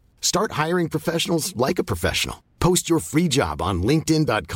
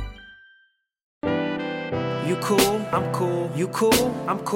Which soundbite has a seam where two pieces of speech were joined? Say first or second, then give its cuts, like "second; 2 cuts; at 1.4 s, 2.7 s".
second; 1 cut; at 1.2 s